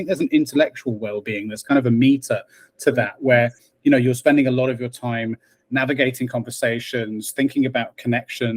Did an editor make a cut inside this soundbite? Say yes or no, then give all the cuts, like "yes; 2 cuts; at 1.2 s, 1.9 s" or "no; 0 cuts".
no; 0 cuts